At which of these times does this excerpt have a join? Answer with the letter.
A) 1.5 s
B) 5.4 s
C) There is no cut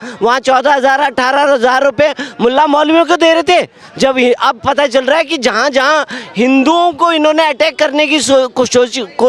C